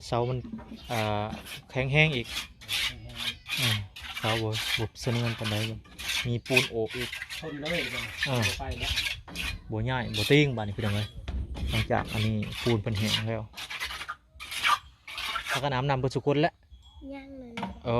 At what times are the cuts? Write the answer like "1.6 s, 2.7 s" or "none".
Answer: 15.6 s